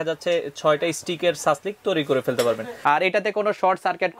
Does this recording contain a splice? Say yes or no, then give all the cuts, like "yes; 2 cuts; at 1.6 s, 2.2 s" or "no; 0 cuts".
yes; 1 cut; at 2.7 s